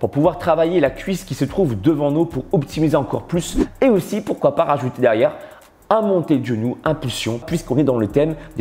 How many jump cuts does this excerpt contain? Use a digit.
2